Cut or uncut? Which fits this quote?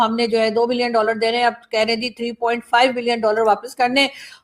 uncut